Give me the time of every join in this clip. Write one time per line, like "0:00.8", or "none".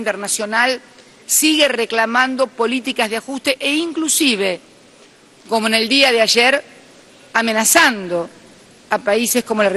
none